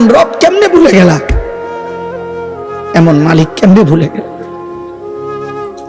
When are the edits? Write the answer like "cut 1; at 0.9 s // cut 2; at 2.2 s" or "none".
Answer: cut 1; at 1.3 s // cut 2; at 2.9 s // cut 3; at 4.7 s